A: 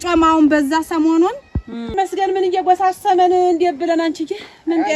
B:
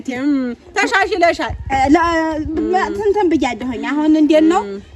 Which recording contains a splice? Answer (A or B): A